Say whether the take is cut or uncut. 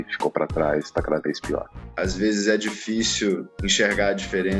cut